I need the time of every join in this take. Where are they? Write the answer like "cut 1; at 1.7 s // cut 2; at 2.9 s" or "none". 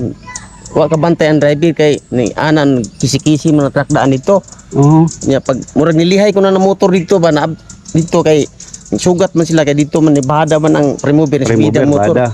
none